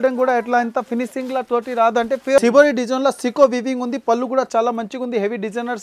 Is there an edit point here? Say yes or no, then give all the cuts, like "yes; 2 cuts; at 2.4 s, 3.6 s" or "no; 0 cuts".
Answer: yes; 1 cut; at 2.4 s